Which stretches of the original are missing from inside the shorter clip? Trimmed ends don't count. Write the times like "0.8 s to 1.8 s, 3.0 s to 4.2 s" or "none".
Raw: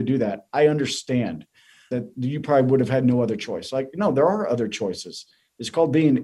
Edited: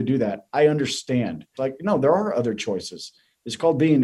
1.4 s to 3.6 s